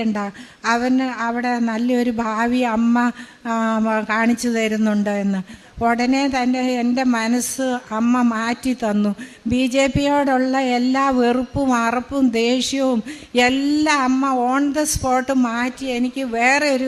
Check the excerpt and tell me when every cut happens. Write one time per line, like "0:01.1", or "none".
none